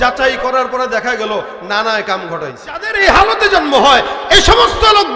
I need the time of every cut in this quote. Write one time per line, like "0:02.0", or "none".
0:02.9

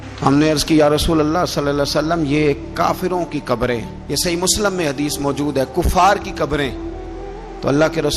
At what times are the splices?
none

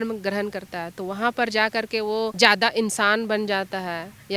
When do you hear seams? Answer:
0:02.3

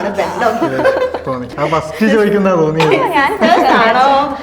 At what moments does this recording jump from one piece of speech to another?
0:01.5

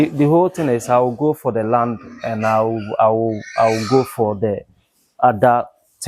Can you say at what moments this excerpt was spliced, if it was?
none

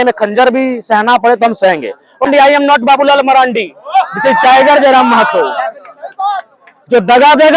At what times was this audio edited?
0:02.3

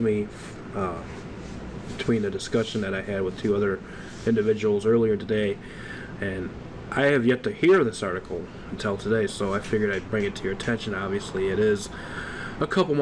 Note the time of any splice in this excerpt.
0:03.3

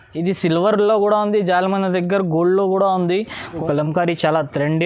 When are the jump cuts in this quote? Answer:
0:03.5

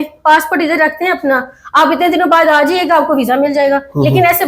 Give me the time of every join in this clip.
none

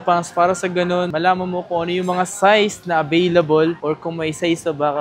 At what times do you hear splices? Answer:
0:01.1

